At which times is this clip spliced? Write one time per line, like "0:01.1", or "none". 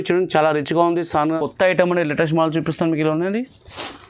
0:01.3